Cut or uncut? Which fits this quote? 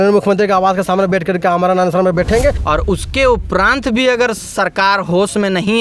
cut